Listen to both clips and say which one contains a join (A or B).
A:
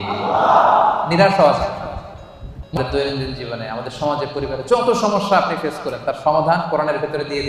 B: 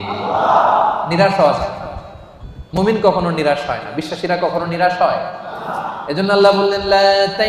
A